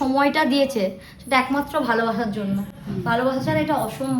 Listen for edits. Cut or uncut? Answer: uncut